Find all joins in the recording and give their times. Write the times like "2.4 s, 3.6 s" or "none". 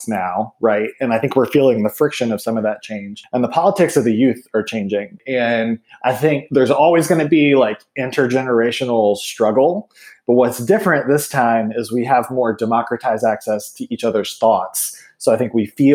3.2 s, 5.2 s